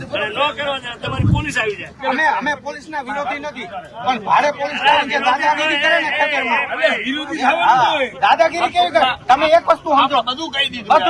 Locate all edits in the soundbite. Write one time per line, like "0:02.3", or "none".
0:01.9
0:08.1

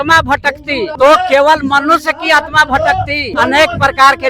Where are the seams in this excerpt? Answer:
0:00.9
0:03.3

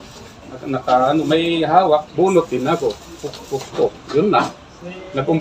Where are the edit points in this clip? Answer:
0:02.1

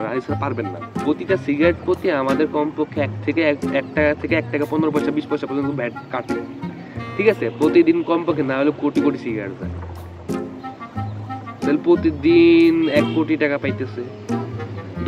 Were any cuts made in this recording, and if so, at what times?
0:00.9

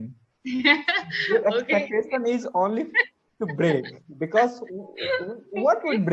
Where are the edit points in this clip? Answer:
none

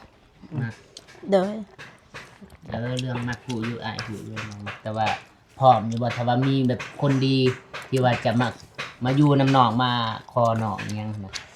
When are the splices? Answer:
none

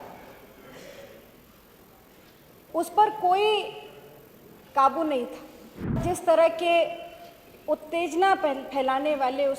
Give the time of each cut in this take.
0:05.9

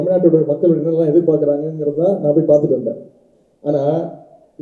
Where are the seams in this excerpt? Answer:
none

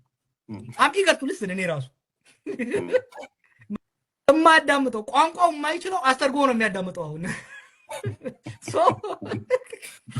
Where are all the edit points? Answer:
0:03.8

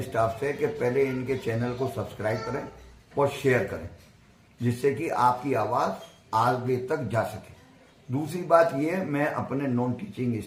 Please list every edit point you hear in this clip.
none

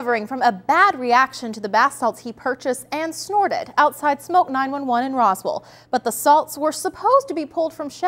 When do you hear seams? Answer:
none

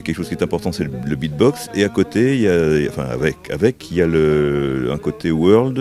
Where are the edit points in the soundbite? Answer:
0:04.4

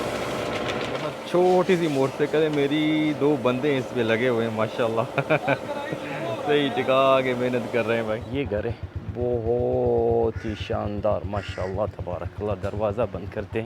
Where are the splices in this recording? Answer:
0:01.1
0:08.2

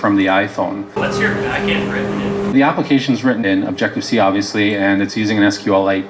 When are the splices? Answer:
none

